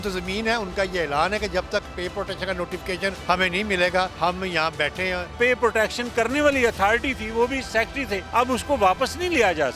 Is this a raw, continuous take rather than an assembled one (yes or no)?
no